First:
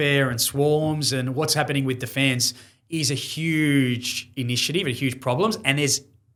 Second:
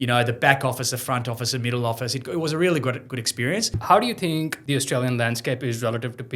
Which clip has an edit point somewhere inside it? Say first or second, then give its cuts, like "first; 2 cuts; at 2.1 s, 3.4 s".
second; 2 cuts; at 3.7 s, 4.6 s